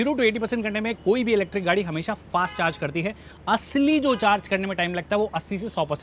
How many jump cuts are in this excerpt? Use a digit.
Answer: 0